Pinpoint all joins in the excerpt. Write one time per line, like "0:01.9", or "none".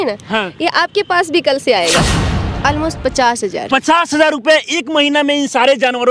0:02.1